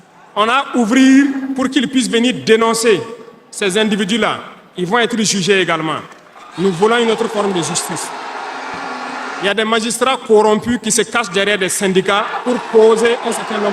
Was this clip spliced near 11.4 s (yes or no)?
no